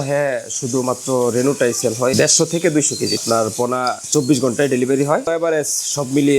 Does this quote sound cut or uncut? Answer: cut